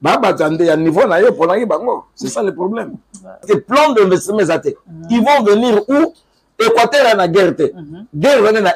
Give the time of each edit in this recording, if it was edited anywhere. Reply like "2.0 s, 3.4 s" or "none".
3.4 s